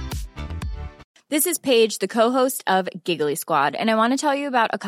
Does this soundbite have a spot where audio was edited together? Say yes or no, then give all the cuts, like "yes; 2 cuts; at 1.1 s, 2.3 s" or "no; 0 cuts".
yes; 1 cut; at 1.1 s